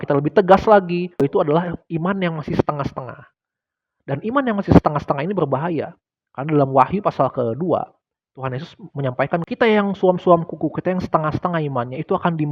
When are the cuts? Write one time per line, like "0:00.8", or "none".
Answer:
0:01.2
0:09.5